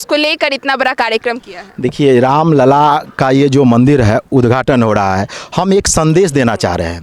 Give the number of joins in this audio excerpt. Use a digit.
0